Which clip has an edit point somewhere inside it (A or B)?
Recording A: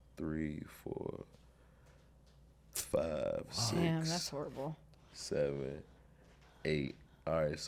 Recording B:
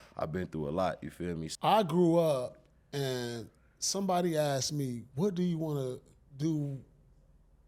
B